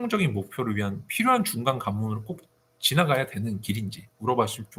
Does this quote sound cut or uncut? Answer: uncut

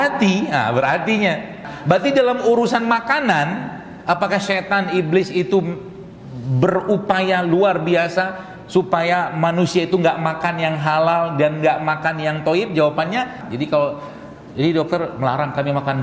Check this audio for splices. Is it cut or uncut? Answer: cut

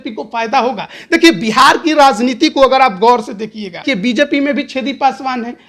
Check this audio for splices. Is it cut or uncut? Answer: cut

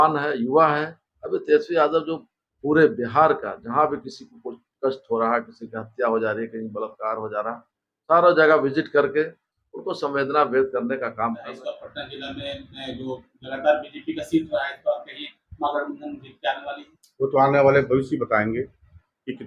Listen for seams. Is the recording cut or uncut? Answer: cut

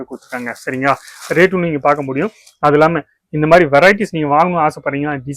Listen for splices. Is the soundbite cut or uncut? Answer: uncut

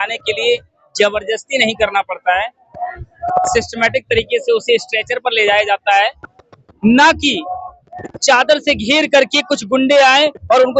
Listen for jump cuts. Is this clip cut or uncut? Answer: uncut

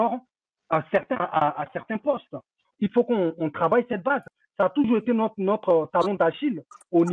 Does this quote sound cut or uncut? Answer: cut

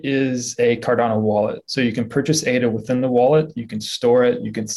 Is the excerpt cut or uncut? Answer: uncut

